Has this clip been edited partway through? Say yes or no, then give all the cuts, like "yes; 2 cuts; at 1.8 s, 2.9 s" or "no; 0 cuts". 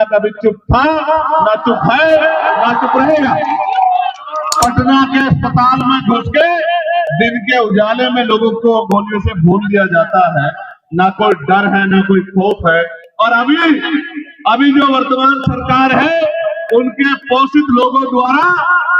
yes; 1 cut; at 4.4 s